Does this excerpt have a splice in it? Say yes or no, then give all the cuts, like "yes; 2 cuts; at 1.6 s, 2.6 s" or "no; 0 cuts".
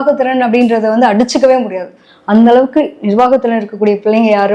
no; 0 cuts